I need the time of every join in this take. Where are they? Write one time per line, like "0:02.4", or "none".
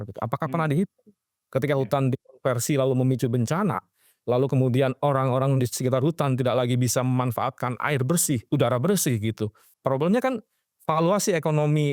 0:09.6